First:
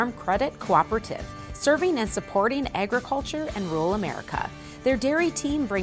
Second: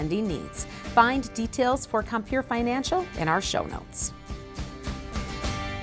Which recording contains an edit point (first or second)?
second